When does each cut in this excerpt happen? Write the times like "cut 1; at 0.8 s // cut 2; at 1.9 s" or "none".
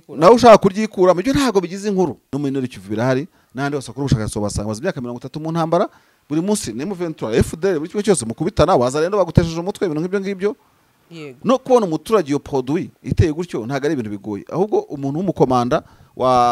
cut 1; at 2.2 s